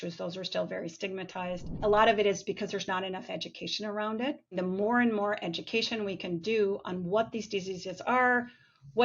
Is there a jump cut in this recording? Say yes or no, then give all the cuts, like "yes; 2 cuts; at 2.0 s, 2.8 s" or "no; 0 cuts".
yes; 2 cuts; at 1.7 s, 4.6 s